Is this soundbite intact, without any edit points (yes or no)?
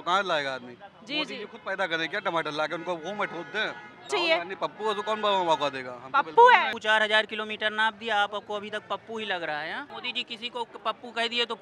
no